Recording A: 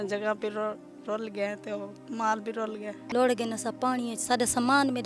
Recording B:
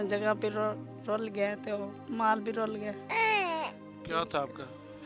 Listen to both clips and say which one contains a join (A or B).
A